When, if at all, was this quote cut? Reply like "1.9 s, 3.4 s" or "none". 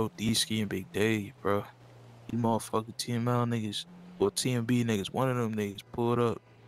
none